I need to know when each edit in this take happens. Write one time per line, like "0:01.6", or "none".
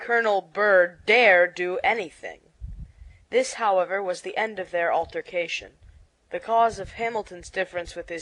none